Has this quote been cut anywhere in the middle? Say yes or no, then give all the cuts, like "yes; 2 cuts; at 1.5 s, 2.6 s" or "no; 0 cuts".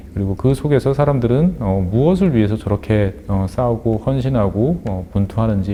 no; 0 cuts